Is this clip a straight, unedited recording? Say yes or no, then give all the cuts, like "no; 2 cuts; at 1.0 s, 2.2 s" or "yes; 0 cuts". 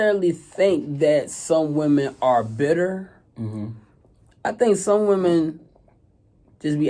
yes; 0 cuts